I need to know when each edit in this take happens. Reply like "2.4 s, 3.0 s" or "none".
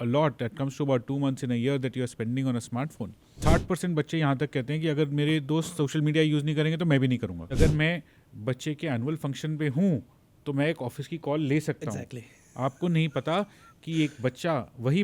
3.3 s, 7.6 s